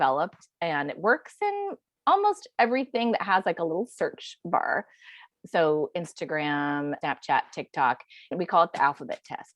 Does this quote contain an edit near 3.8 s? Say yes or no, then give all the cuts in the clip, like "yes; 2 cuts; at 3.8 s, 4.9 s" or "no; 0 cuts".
no; 3 cuts; at 5.2 s, 7.0 s, 8.3 s